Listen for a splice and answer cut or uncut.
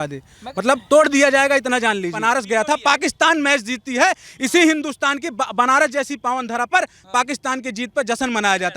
cut